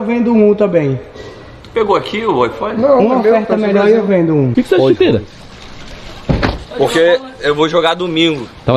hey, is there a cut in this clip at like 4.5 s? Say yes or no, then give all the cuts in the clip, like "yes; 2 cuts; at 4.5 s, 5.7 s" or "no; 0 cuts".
yes; 1 cut; at 4.5 s